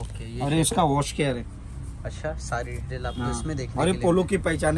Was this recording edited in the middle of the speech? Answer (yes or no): no